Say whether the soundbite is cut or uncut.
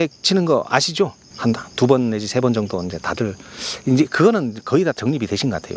cut